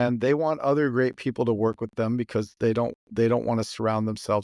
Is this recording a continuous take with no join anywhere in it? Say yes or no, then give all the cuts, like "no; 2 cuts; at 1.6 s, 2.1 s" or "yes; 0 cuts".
yes; 0 cuts